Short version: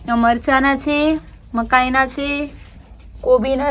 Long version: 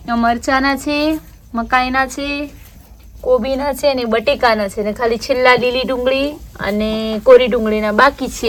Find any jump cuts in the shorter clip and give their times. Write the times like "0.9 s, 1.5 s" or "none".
none

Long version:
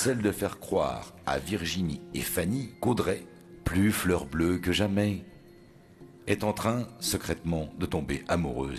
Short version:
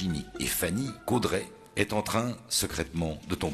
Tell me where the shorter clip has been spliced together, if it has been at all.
1.6 s

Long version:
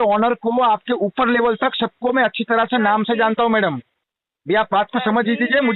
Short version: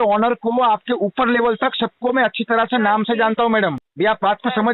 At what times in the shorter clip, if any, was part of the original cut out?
3.8 s

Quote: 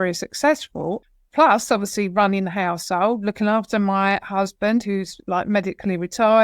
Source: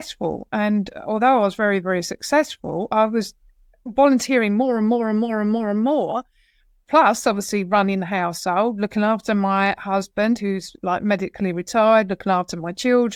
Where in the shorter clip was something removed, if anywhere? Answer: 1.0 s

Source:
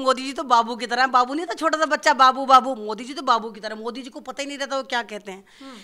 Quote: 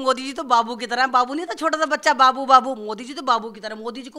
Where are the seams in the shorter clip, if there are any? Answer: none

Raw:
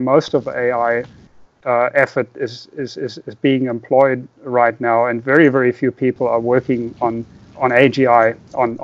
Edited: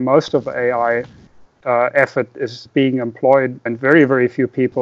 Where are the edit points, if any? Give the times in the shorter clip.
2.6 s, 3.7 s

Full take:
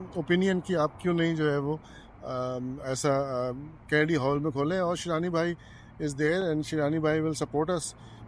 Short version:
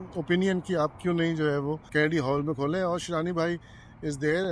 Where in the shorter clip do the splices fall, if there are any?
1.8 s

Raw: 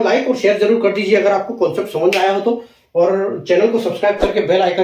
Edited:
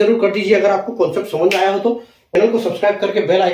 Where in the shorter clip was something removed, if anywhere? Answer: 2.4 s

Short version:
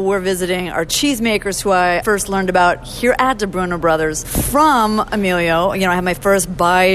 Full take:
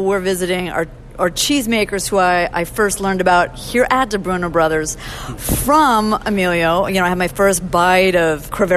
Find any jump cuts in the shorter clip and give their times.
0.9 s, 2.0 s, 4.3 s

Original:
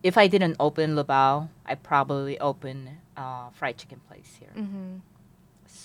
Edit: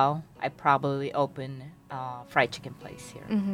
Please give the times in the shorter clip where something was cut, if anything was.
none

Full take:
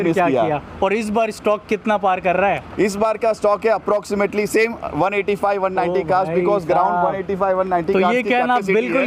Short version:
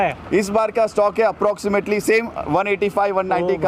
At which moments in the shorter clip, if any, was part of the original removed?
none

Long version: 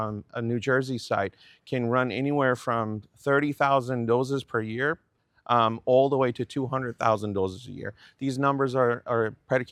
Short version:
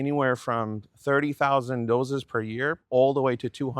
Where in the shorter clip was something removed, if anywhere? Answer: 2.8 s

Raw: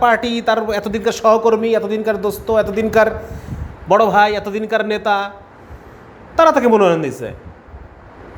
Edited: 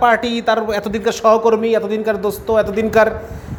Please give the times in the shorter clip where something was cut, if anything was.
none

